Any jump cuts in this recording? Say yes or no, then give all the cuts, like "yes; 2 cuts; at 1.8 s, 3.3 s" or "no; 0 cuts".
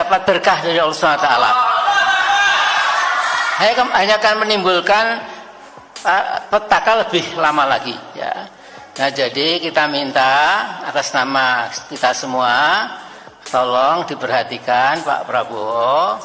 no; 0 cuts